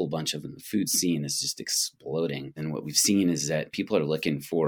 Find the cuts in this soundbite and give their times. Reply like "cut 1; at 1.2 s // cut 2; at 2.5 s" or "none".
cut 1; at 2.6 s // cut 2; at 3.7 s